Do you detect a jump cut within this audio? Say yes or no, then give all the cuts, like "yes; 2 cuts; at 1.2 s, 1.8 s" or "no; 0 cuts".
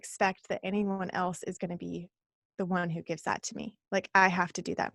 yes; 1 cut; at 3.8 s